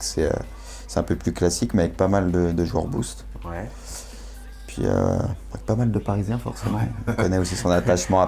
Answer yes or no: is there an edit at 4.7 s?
yes